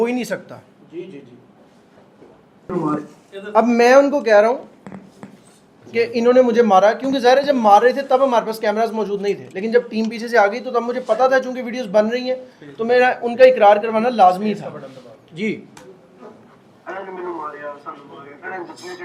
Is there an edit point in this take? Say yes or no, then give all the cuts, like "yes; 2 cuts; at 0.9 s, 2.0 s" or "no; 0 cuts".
no; 0 cuts